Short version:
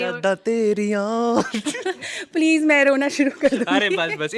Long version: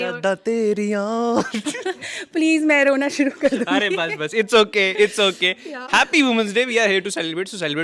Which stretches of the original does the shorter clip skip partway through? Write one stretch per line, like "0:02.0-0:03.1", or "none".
none